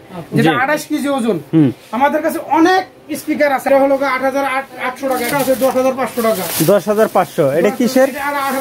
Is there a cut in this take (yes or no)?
yes